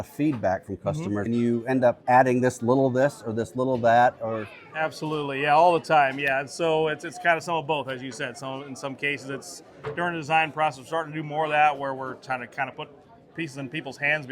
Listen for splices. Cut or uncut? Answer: cut